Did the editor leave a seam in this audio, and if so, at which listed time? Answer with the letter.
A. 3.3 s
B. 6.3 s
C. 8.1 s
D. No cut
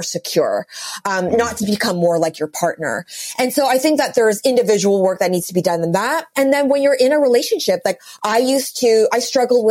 D